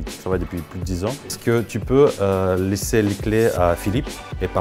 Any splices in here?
yes; 1 cut; at 1.4 s

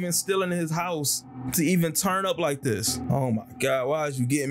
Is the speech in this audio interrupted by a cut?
yes; 1 cut; at 2.9 s

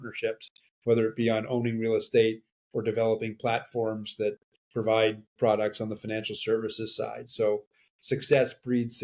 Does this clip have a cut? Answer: no; 0 cuts

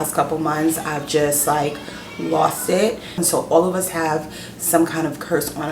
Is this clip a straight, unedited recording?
no; 1 cut; at 3.2 s

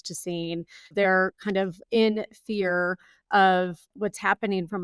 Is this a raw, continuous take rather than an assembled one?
no; 2 cuts; at 0.9 s, 3.9 s

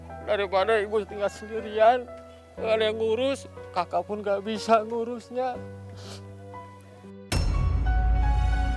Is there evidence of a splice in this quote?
no; 0 cuts

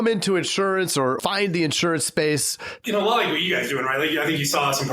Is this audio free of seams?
no; 1 cut; at 2.8 s

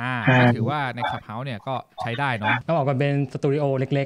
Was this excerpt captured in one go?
no; 1 cut; at 2.6 s

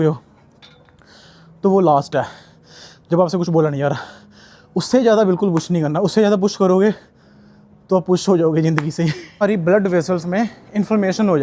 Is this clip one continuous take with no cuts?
no; 1 cut; at 9.4 s

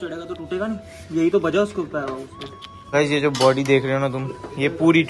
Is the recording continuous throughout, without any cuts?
no; 1 cut; at 2.9 s

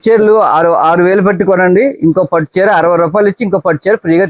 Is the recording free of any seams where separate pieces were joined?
yes; 0 cuts

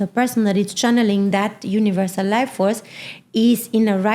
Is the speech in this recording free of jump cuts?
yes; 0 cuts

